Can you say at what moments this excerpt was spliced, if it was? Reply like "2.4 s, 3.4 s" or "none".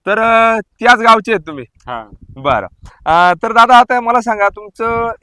none